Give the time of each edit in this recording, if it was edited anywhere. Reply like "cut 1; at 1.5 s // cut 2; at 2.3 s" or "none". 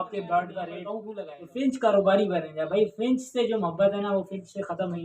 cut 1; at 1.0 s